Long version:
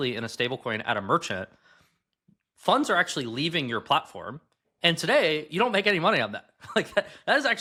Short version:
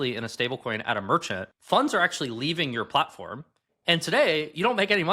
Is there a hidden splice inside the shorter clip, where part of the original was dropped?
yes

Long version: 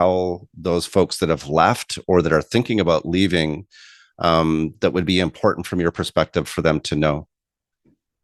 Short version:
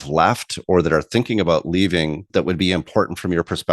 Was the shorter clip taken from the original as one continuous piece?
no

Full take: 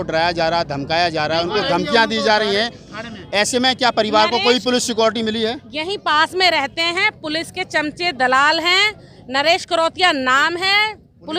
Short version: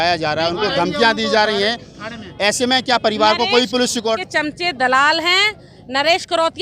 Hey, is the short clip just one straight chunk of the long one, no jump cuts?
no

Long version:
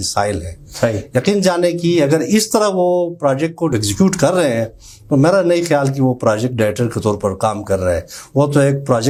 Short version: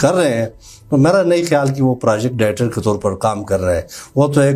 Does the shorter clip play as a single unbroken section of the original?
yes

